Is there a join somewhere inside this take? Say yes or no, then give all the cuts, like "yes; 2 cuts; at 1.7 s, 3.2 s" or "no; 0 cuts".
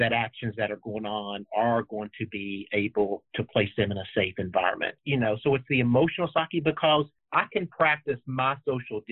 yes; 2 cuts; at 5.0 s, 7.2 s